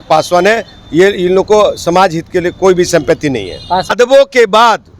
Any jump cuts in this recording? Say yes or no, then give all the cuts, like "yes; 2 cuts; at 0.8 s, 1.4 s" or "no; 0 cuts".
yes; 1 cut; at 3.9 s